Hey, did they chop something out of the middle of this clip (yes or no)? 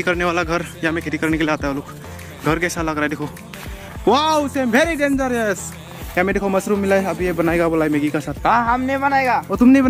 no